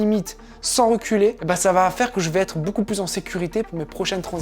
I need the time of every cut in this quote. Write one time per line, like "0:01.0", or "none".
0:01.4